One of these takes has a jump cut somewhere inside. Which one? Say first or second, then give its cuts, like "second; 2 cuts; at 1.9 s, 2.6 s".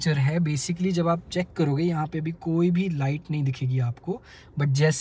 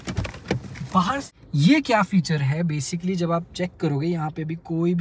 second; 1 cut; at 1.3 s